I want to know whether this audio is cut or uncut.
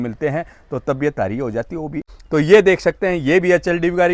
cut